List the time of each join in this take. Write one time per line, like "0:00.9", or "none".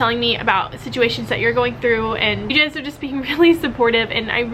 0:02.5